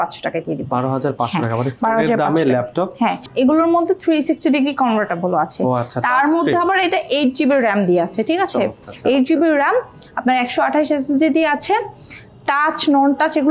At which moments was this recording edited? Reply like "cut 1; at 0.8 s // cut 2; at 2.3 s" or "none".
cut 1; at 3.2 s